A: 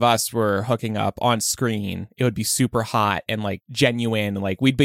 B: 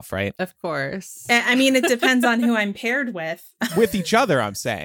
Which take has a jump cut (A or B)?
B